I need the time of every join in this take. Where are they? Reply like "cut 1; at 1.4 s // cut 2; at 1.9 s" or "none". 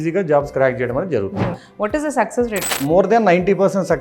cut 1; at 1.6 s // cut 2; at 2.8 s